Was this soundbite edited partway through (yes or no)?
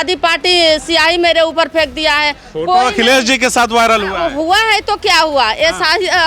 no